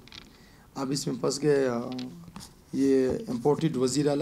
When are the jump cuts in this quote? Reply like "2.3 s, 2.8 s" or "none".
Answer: none